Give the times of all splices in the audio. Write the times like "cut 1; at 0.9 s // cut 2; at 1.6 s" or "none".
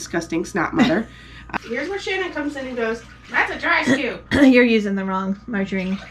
cut 1; at 1.3 s // cut 2; at 3.2 s